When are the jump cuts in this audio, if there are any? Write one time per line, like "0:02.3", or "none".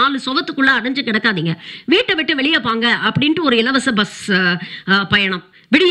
none